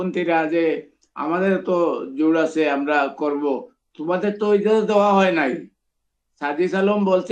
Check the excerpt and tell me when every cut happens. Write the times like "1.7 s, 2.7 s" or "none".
none